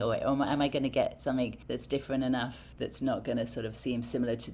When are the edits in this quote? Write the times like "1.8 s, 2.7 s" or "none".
1.6 s, 2.6 s